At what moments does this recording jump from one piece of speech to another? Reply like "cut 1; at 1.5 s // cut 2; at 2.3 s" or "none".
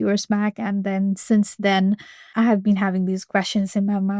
cut 1; at 2.3 s